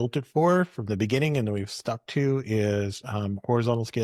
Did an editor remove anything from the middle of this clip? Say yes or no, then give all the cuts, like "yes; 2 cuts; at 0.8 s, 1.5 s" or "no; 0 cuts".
no; 0 cuts